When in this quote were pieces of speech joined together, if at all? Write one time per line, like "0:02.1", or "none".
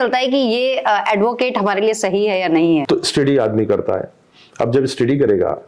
0:02.8